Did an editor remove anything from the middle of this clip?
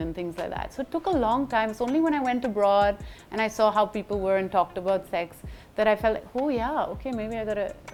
no; 0 cuts

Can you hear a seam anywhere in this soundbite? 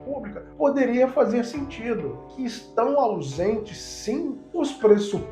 yes; 1 cut; at 2.2 s

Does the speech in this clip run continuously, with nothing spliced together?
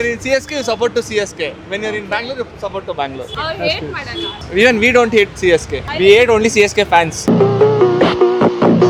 yes; 0 cuts

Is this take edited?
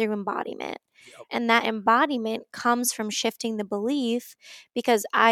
yes; 1 cut; at 1.3 s

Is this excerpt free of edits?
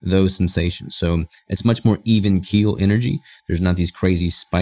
yes; 0 cuts

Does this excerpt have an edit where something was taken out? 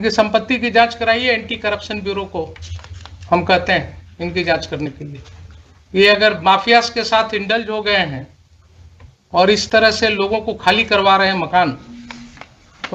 no; 0 cuts

